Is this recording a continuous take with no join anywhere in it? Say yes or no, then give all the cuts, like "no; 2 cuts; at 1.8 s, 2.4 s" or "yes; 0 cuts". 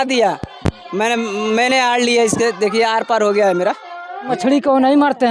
no; 1 cut; at 4.3 s